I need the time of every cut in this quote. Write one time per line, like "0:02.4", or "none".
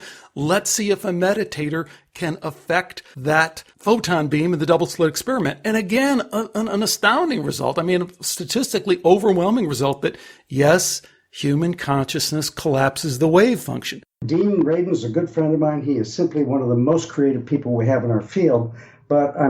0:03.3
0:14.2